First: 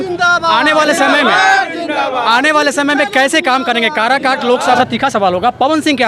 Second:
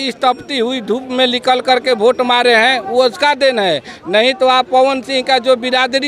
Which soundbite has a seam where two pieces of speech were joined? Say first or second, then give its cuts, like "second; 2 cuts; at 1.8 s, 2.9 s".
first; 1 cut; at 4.8 s